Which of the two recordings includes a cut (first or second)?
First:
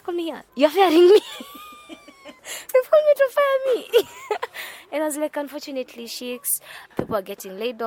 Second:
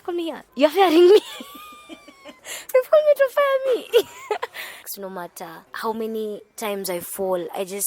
second